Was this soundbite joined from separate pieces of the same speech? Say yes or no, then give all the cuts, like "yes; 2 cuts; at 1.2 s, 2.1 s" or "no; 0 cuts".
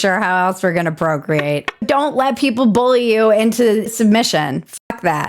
yes; 2 cuts; at 1.8 s, 3.9 s